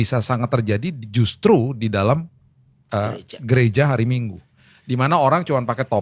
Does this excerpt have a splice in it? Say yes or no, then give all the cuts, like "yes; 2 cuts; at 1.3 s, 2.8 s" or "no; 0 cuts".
no; 0 cuts